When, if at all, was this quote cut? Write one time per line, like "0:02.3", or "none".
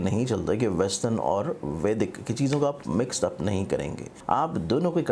0:04.1